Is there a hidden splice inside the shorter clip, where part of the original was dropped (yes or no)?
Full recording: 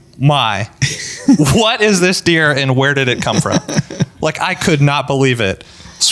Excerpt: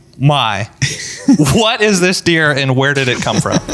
no